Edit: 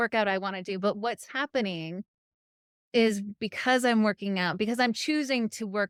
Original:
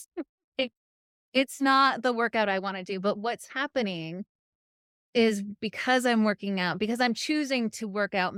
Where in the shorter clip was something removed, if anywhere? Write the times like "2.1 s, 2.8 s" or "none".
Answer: none